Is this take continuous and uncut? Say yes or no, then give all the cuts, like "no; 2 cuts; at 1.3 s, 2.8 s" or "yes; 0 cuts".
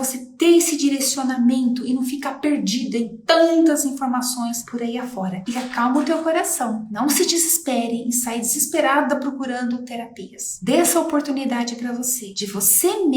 yes; 0 cuts